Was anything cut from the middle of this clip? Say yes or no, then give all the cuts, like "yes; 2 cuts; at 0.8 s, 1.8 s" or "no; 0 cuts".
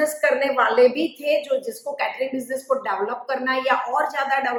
no; 0 cuts